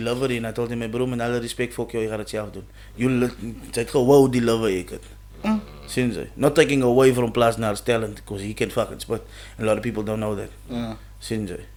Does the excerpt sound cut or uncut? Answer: uncut